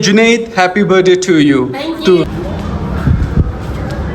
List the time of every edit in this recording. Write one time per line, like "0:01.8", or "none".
0:02.4